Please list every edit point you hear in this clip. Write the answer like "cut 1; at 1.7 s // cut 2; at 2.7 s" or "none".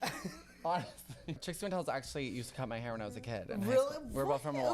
cut 1; at 1.4 s